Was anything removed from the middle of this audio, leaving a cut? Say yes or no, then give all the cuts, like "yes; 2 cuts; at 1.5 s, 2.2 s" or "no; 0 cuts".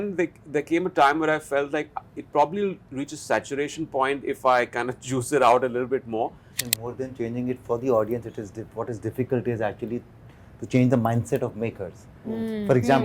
yes; 1 cut; at 6.5 s